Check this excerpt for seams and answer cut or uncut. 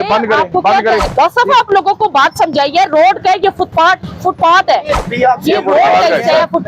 cut